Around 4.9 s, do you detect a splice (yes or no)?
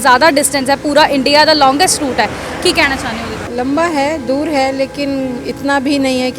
no